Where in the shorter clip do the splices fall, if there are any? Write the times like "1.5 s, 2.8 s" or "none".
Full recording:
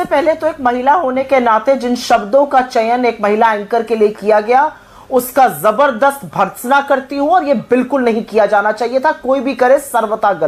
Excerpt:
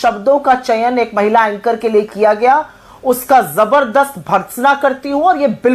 none